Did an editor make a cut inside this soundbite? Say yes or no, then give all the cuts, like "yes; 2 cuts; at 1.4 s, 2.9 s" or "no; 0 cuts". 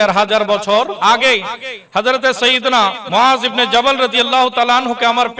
yes; 2 cuts; at 0.9 s, 3.0 s